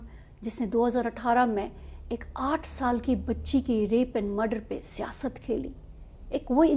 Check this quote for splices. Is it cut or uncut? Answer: uncut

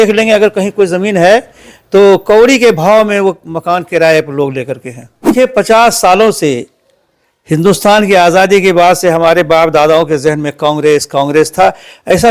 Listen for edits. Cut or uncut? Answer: cut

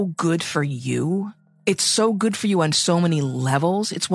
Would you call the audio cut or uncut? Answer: cut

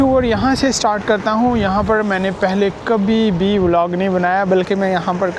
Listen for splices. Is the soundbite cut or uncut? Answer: uncut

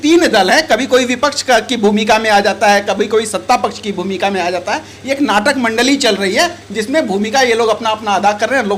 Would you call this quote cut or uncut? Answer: uncut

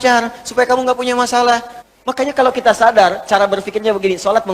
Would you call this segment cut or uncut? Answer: cut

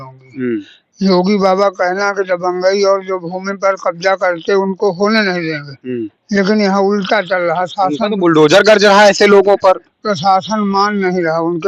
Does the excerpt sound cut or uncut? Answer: uncut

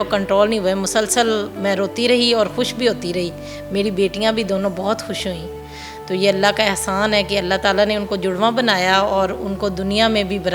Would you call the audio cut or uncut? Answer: uncut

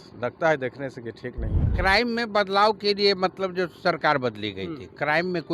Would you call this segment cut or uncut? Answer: cut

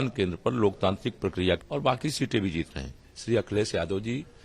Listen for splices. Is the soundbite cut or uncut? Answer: cut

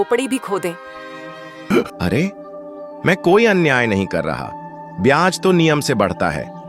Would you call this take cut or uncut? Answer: cut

